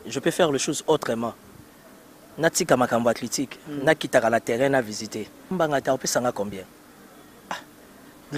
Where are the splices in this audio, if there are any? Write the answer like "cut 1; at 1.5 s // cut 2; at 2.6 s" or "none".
cut 1; at 5.5 s